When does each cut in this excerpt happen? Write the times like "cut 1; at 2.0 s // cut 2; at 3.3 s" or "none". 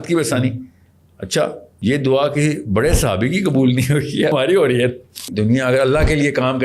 cut 1; at 1.7 s // cut 2; at 4.3 s // cut 3; at 5.3 s